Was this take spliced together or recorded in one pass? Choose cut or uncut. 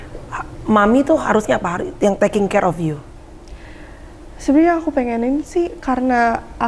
uncut